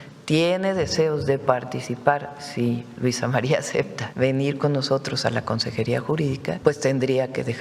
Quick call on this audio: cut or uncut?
cut